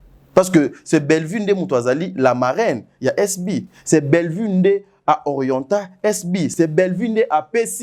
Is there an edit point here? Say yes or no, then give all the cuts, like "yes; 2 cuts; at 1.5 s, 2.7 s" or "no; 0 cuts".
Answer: no; 0 cuts